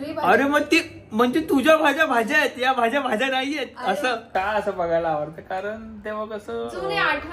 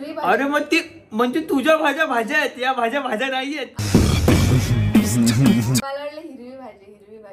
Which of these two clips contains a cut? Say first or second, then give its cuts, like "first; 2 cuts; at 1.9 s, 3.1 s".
first; 1 cut; at 3.9 s